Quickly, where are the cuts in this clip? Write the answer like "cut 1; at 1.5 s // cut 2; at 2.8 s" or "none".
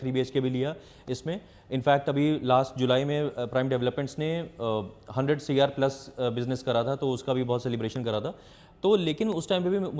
none